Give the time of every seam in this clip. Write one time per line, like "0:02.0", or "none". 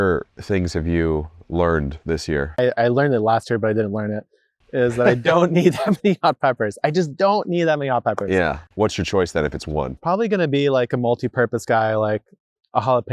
0:02.6
0:08.6
0:10.0